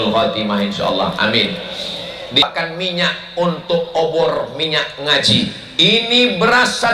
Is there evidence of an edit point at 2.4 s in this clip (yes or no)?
yes